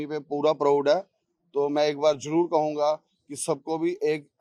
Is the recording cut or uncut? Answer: uncut